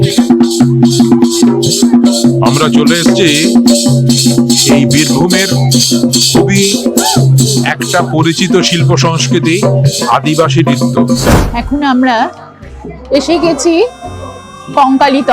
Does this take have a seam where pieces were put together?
yes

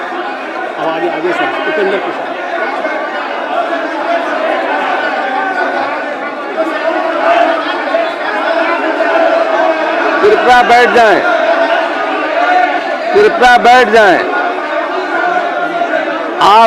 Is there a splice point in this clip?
no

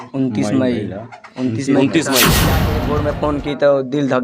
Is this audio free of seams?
no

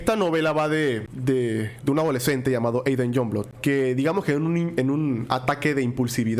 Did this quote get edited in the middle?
yes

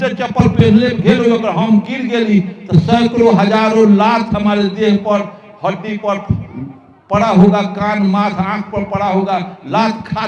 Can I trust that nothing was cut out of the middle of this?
yes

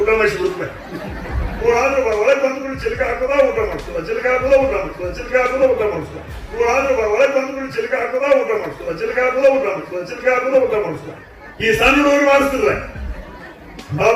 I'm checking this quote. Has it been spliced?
yes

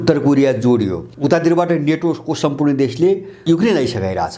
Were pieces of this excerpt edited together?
yes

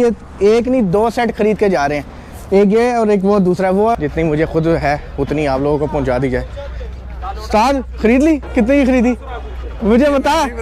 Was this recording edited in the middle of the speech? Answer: yes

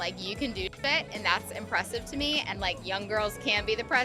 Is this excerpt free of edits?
no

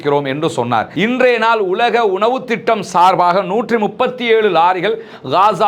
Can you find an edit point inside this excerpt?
yes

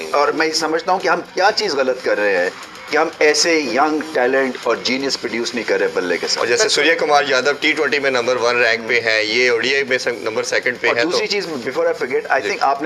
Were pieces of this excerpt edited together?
no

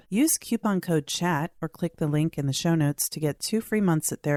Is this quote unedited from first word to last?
yes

